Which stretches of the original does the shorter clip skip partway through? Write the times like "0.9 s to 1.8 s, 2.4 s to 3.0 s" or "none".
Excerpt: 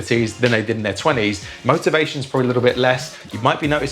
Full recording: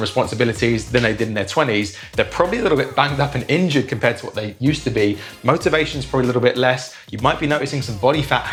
2.0 s to 5.3 s